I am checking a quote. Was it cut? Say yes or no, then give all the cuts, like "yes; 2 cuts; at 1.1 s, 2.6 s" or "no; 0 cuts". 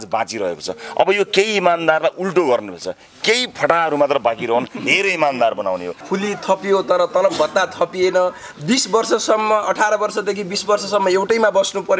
yes; 1 cut; at 6.0 s